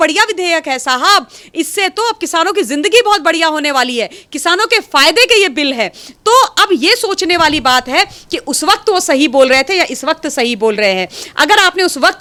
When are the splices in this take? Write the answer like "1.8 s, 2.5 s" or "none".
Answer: none